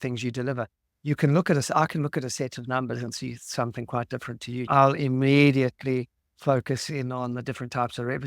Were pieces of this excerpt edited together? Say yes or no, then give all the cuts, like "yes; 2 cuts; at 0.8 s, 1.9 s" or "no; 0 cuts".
yes; 1 cut; at 4.7 s